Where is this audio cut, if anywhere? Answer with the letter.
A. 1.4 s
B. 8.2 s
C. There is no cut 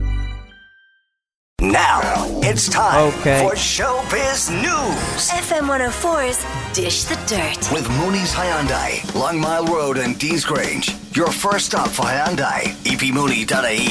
A